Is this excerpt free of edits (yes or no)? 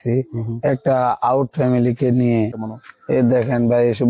no